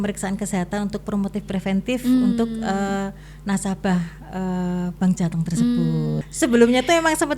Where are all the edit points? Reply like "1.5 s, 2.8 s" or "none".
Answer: 6.2 s